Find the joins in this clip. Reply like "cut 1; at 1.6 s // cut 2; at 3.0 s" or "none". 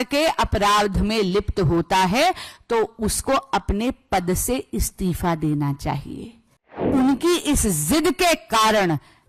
cut 1; at 6.8 s